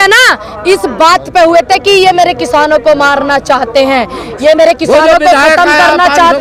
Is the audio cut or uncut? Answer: uncut